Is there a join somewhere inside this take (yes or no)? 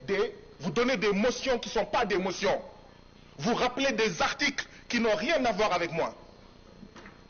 no